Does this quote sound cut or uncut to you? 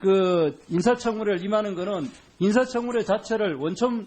cut